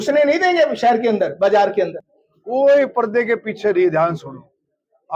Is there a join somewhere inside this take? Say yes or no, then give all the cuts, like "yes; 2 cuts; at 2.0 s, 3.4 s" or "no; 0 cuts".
yes; 1 cut; at 2.0 s